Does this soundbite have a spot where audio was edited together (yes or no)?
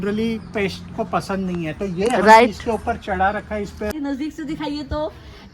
yes